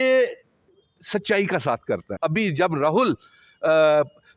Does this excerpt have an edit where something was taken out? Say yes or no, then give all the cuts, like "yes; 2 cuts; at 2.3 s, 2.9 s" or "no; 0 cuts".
yes; 1 cut; at 2.1 s